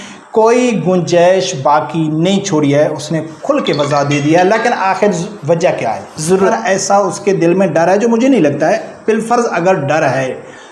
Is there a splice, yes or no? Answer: yes